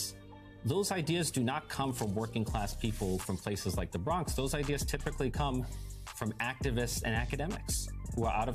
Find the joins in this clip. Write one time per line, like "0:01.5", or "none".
none